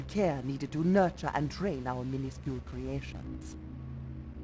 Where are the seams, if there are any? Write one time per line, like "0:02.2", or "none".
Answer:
0:03.0